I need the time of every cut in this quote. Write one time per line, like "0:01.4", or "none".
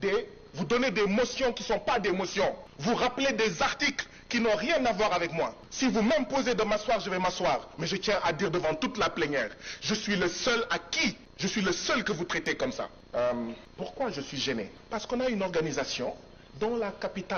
0:02.7
0:05.6
0:11.3
0:13.0
0:13.7
0:14.8